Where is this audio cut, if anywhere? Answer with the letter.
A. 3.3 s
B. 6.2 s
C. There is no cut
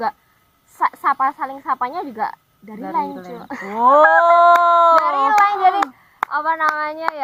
C